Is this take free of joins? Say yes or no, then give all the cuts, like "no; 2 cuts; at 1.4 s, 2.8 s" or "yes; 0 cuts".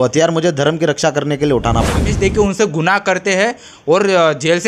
no; 1 cut; at 2.1 s